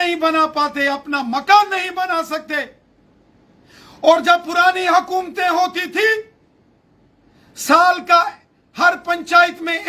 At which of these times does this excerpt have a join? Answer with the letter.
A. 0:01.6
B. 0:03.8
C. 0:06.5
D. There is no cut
D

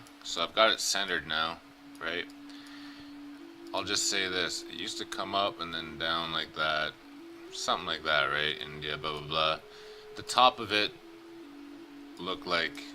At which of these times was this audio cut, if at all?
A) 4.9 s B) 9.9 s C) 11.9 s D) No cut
A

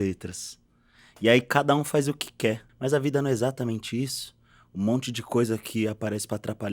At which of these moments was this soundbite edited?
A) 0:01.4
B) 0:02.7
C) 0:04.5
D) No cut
B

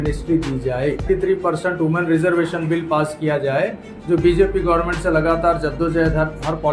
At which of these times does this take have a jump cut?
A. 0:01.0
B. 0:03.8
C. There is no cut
A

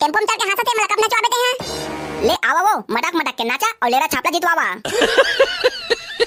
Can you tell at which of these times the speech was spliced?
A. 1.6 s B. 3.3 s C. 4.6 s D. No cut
D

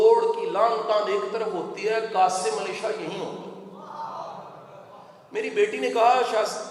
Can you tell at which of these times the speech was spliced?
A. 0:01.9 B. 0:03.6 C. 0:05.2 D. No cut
D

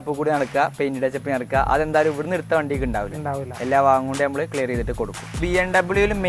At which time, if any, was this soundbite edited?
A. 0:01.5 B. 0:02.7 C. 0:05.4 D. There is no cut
C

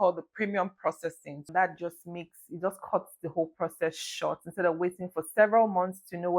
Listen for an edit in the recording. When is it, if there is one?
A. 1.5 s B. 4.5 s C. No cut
C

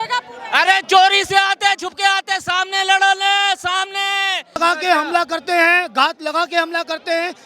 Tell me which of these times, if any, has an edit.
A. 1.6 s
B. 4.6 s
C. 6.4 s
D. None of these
B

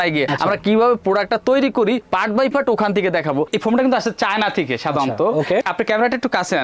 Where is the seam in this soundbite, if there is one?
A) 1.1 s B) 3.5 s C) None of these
B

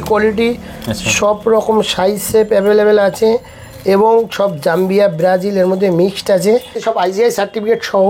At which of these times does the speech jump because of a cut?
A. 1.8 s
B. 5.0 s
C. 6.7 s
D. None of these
C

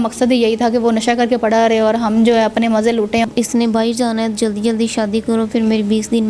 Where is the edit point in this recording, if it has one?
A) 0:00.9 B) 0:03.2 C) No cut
B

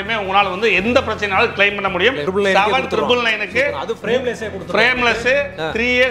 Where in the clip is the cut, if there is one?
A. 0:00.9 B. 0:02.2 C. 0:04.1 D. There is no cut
B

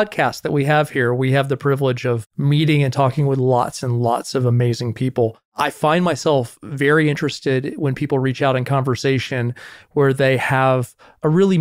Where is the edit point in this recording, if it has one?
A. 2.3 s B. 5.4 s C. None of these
B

